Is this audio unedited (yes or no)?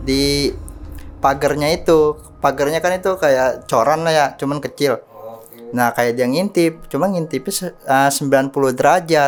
yes